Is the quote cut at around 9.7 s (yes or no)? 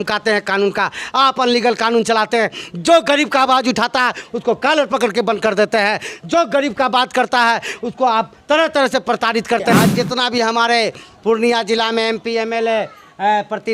yes